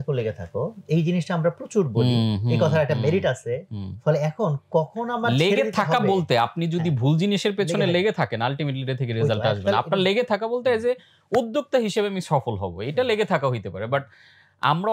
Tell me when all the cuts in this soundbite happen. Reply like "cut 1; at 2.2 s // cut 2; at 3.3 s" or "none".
none